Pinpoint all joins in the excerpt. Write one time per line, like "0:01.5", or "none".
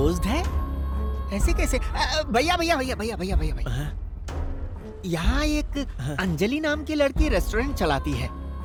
none

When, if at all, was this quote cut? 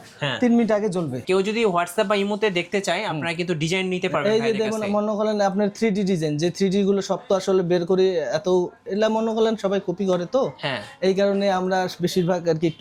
0:01.2

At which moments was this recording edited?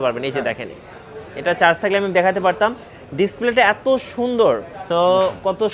0:04.7

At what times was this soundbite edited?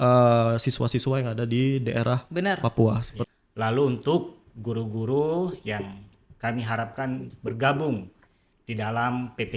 0:03.1

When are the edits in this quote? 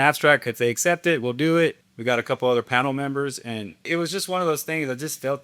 0:01.9
0:03.9

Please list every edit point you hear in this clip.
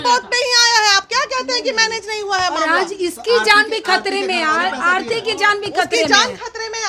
none

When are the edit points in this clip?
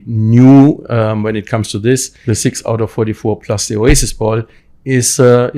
0:02.1

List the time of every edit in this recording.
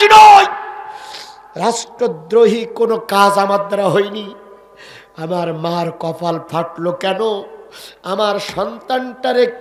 none

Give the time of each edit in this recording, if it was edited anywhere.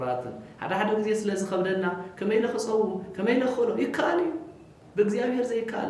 none

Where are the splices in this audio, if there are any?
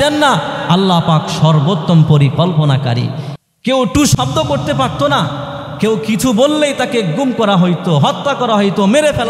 0:03.2

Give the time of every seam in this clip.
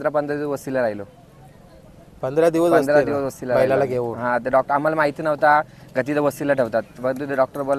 none

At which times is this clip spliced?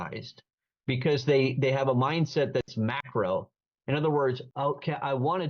0:04.4

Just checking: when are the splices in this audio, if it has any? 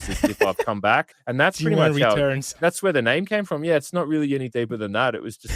0:01.2

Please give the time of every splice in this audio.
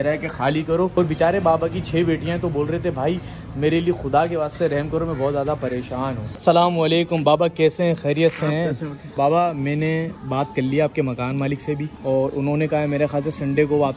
0:01.0
0:06.3
0:09.2
0:11.9

